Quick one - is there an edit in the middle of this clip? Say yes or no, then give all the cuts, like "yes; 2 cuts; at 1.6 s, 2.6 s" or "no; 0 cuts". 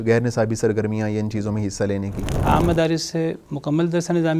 yes; 1 cut; at 2.3 s